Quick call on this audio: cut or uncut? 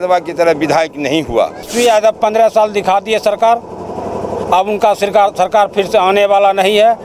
cut